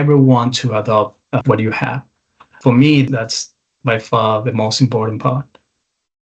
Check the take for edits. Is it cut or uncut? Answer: cut